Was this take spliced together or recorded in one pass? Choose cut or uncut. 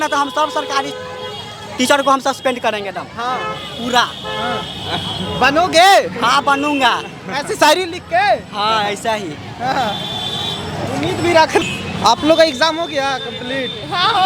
uncut